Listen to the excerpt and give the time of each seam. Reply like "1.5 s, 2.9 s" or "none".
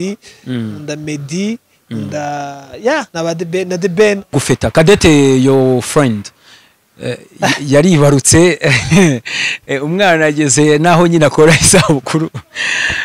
4.3 s